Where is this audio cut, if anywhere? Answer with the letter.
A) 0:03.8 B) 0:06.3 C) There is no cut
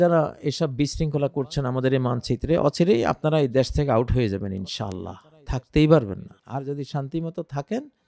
B